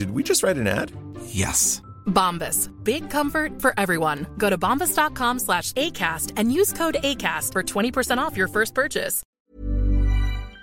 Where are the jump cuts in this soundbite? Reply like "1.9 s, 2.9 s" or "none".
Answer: 9.3 s